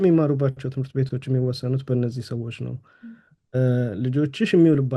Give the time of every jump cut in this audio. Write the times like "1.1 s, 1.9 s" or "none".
none